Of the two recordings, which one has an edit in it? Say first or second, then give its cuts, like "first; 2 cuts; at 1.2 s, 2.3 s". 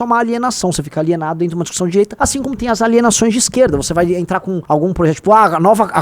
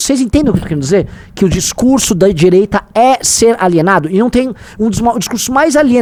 first; 2 cuts; at 2.1 s, 4.6 s